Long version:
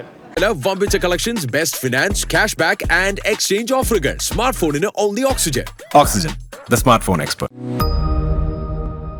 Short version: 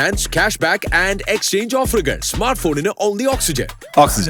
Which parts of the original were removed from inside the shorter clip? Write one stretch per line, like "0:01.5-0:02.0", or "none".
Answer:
none